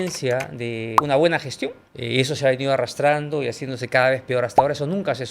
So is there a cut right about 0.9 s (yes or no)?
yes